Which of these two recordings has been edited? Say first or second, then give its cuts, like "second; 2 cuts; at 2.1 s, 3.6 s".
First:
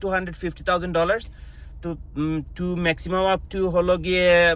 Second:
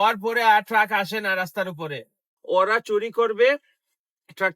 second; 1 cut; at 2.3 s